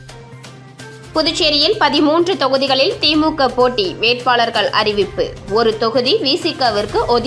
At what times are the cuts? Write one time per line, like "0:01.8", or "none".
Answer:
0:00.9